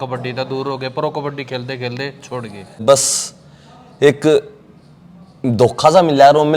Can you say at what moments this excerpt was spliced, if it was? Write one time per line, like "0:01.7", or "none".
0:02.8